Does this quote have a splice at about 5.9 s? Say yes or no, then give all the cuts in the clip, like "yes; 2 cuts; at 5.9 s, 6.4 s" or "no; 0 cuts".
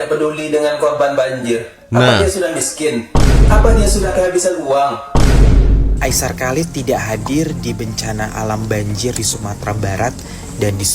yes; 1 cut; at 5.9 s